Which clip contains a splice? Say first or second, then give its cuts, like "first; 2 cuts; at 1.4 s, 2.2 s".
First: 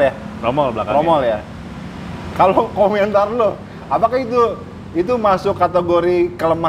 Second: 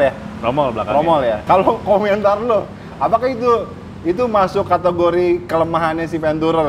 second; 1 cut; at 1.4 s